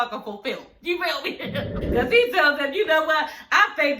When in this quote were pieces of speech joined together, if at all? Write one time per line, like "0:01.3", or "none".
0:01.9